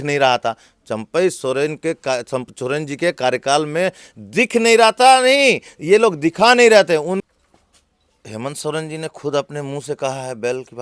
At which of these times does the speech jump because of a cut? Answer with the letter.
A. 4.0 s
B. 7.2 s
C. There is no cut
B